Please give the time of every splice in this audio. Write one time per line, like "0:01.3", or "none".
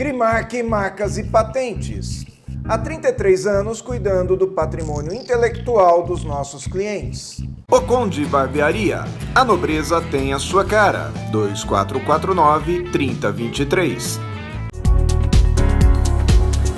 0:14.6